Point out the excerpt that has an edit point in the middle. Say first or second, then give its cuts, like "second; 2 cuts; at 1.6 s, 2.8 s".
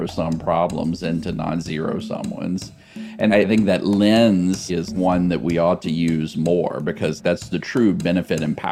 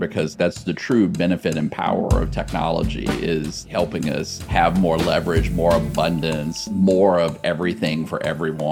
second; 1 cut; at 4.4 s